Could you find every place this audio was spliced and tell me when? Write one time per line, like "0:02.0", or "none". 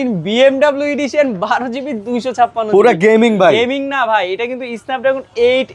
none